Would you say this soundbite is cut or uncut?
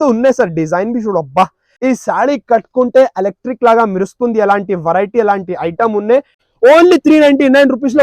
cut